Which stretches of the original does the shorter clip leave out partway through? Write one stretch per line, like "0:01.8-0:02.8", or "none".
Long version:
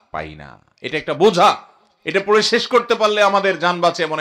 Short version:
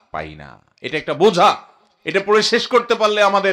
none